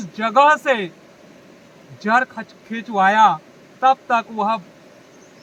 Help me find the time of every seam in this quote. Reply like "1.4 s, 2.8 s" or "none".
none